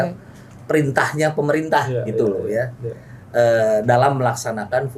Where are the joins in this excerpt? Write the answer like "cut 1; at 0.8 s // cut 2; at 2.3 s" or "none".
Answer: none